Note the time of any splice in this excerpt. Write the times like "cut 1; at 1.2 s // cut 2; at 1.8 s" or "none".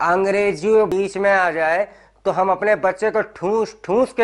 cut 1; at 0.9 s